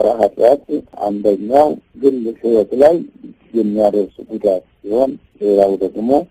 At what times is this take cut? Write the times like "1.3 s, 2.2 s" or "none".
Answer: 0.9 s, 1.9 s